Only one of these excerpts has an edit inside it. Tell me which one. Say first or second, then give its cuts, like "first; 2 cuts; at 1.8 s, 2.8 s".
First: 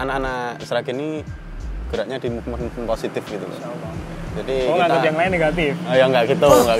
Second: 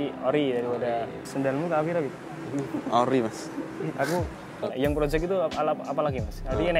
second; 2 cuts; at 1.2 s, 4.6 s